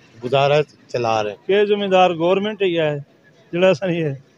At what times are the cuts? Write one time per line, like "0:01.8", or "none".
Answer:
0:01.3